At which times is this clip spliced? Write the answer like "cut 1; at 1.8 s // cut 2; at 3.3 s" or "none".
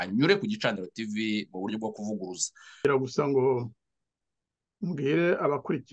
cut 1; at 2.8 s

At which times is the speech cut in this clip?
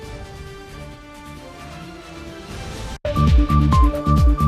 cut 1; at 3.0 s

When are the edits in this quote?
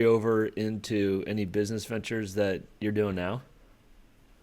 none

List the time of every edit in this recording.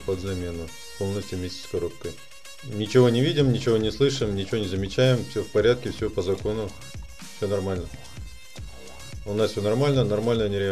cut 1; at 2.6 s

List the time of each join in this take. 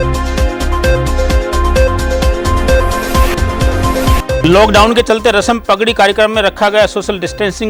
none

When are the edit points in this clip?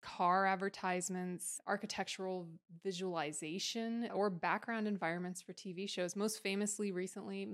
cut 1; at 1.5 s // cut 2; at 4.1 s

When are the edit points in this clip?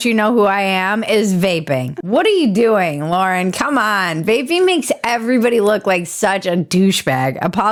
none

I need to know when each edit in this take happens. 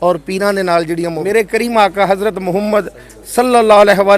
cut 1; at 1.3 s

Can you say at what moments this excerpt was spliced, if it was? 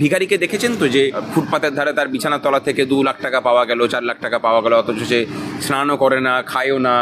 cut 1; at 1.2 s

